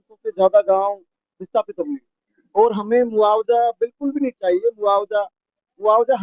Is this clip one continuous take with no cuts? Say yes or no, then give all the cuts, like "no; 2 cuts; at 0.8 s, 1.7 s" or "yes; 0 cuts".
yes; 0 cuts